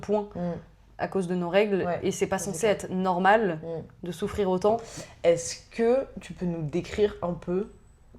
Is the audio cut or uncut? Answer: uncut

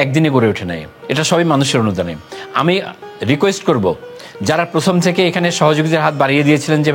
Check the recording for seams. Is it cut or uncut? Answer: cut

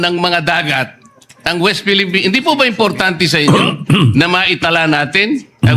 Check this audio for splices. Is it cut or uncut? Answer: uncut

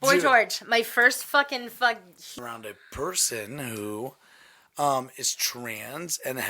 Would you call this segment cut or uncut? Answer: cut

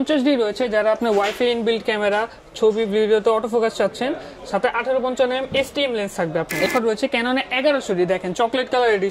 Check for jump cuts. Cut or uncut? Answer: cut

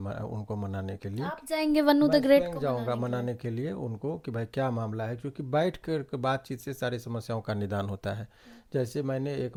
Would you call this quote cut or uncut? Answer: uncut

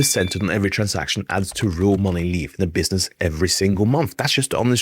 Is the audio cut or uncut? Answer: uncut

